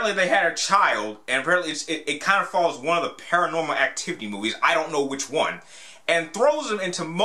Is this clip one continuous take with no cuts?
no; 1 cut; at 3.4 s

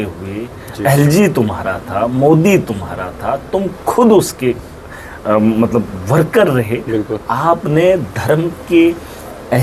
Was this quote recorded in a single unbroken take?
yes; 0 cuts

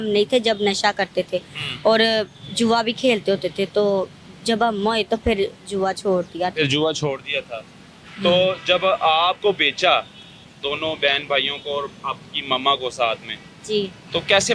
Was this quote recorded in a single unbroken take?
yes; 0 cuts

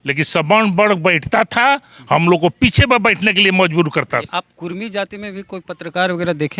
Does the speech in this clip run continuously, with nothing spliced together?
no; 1 cut; at 4.3 s

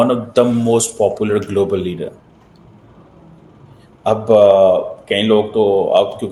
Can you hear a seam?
no; 0 cuts

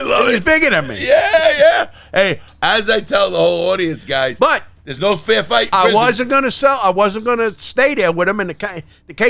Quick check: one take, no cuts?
yes; 0 cuts

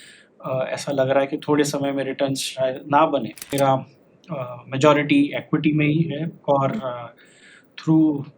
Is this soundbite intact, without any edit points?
no; 1 cut; at 3.5 s

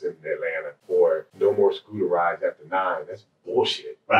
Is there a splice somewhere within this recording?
yes; 1 cut; at 1.0 s

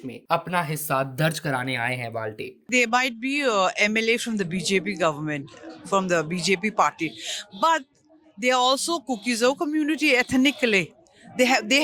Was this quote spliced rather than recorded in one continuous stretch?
yes; 1 cut; at 2.7 s

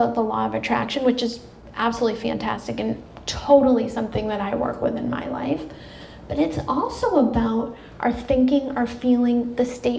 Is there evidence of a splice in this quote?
yes; 1 cut; at 3.2 s

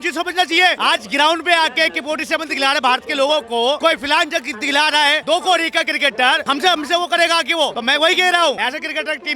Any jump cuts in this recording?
yes; 6 cuts; at 0.8 s, 3.8 s, 5.2 s, 6.4 s, 7.8 s, 8.6 s

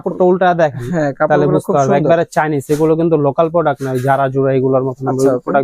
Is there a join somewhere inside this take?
no; 0 cuts

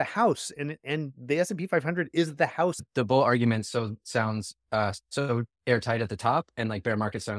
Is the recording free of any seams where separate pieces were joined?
no; 1 cut; at 2.9 s

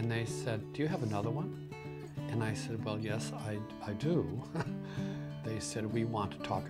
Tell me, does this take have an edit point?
no; 0 cuts

